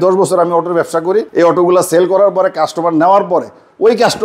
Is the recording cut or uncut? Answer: uncut